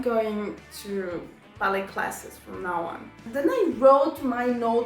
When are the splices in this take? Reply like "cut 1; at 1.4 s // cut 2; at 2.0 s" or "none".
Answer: cut 1; at 3.2 s